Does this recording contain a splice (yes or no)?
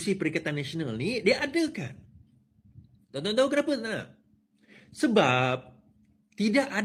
no